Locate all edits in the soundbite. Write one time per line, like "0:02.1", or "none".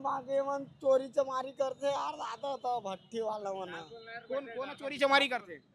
none